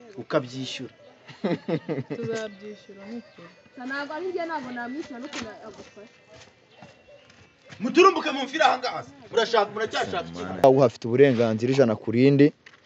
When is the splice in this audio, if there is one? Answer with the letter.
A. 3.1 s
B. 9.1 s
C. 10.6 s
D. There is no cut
C